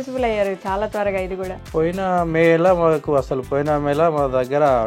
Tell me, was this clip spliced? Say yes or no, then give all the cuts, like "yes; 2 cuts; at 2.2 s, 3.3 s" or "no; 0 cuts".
no; 0 cuts